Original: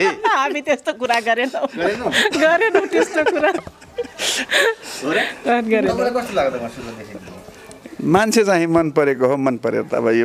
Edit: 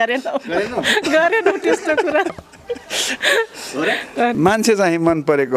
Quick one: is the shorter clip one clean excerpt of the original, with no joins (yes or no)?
no